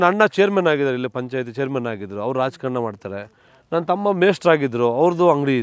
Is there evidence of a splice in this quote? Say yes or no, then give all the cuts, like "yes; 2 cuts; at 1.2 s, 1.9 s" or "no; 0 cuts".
no; 0 cuts